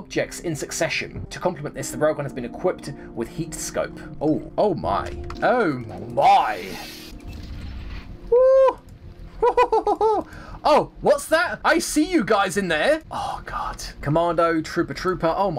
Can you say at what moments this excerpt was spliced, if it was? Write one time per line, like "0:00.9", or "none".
0:07.1
0:13.9